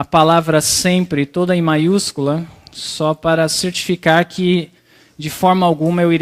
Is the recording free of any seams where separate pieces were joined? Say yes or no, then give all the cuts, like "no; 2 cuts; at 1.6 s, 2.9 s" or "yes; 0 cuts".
no; 1 cut; at 1.6 s